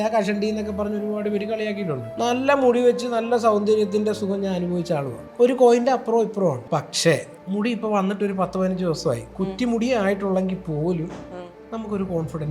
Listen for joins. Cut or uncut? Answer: cut